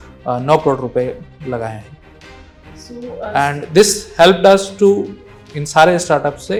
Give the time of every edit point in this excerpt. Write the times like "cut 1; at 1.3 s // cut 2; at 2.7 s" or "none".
none